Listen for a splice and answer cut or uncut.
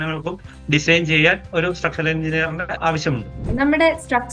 cut